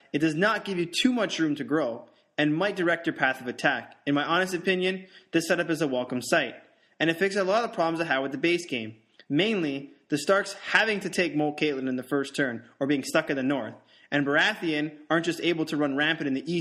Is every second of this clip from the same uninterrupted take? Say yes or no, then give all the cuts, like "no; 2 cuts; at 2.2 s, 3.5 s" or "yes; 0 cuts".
yes; 0 cuts